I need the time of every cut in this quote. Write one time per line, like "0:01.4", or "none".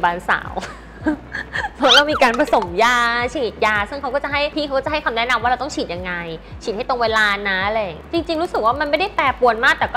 0:04.5
0:08.1